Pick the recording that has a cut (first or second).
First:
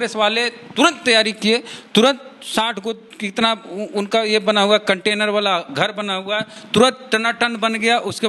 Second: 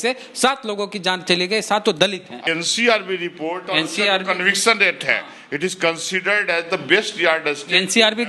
second